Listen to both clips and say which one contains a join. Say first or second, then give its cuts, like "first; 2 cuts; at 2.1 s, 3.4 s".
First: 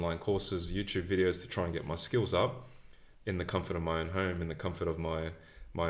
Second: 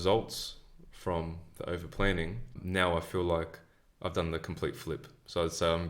second; 1 cut; at 2.6 s